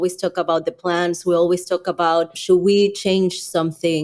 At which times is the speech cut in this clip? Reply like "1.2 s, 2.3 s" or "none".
2.4 s